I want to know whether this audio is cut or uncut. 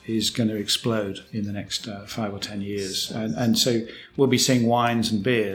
cut